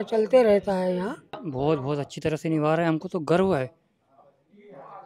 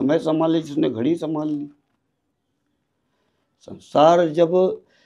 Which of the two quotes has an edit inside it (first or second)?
first